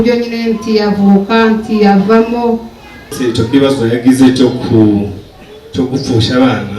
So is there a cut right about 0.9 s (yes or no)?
no